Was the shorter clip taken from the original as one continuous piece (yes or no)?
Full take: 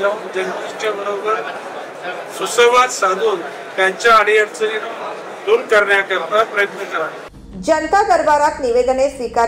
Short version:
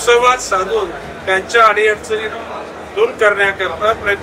yes